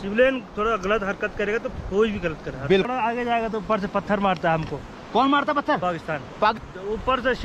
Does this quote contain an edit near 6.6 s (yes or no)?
yes